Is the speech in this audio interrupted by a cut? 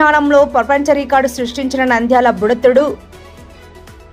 no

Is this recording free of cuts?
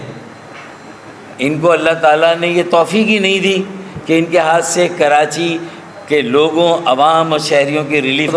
yes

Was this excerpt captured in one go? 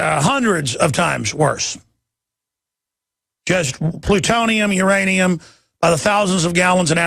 no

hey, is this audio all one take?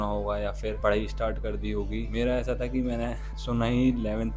no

